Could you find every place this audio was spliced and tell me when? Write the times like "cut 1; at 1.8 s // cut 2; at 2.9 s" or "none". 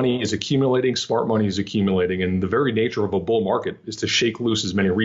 none